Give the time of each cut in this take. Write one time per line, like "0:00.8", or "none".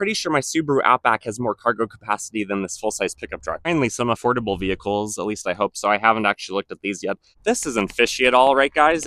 0:03.7
0:07.3